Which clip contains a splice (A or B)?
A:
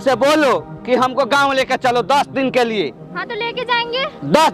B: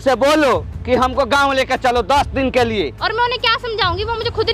B